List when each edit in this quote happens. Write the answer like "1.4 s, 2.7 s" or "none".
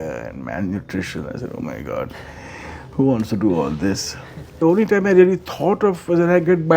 4.5 s